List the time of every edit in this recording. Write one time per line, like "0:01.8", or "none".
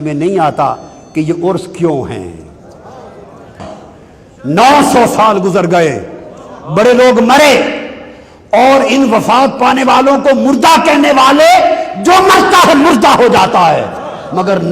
0:03.6